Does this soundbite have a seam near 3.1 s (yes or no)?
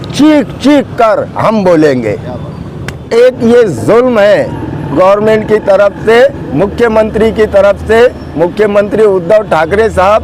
yes